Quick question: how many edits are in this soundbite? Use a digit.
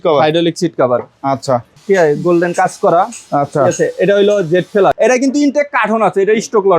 2